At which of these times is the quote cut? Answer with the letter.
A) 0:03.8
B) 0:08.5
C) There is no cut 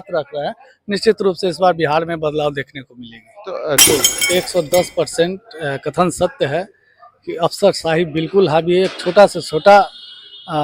A